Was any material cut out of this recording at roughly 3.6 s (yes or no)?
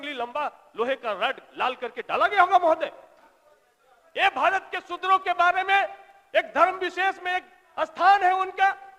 no